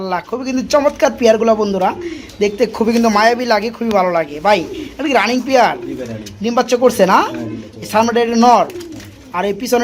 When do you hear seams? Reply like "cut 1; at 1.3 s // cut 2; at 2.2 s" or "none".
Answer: none